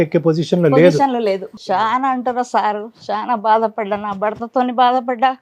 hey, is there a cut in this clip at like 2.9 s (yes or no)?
no